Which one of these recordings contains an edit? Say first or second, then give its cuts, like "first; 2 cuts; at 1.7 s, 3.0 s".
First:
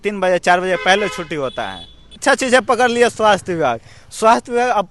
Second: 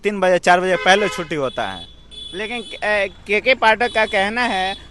first; 1 cut; at 2.2 s